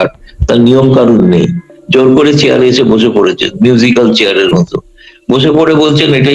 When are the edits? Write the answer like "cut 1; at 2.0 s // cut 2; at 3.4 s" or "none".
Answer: none